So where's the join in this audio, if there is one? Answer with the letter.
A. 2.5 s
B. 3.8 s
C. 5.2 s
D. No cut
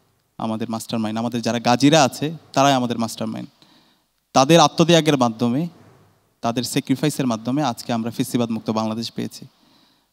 D